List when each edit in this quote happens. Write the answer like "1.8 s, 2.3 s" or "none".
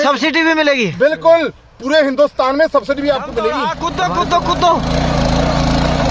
3.9 s